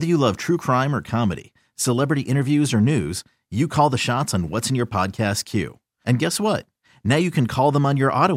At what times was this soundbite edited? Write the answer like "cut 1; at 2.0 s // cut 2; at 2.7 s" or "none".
none